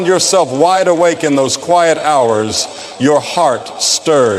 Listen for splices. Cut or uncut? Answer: cut